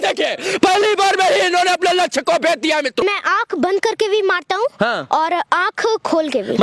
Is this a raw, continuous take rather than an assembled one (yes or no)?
no